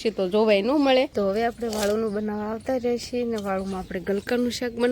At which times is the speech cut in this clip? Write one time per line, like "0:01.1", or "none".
0:01.1